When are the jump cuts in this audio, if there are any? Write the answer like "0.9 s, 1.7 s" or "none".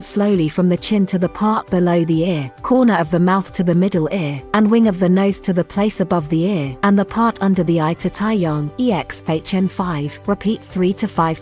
2.5 s, 4.4 s, 6.7 s, 8.7 s, 10.1 s